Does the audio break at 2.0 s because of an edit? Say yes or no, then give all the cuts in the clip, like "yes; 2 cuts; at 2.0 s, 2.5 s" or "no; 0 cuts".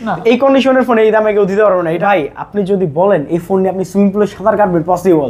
yes; 1 cut; at 2.0 s